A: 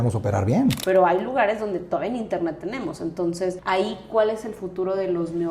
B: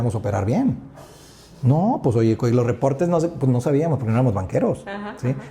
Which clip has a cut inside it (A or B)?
A